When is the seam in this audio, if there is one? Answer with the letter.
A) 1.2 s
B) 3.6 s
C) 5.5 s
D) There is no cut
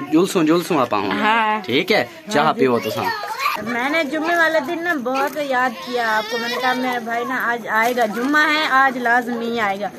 B